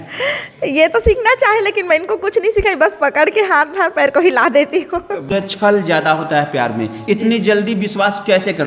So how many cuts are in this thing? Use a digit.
1